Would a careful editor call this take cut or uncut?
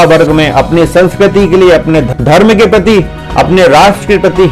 cut